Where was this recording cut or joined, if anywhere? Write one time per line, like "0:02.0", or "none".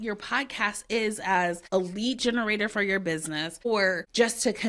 0:01.6
0:03.8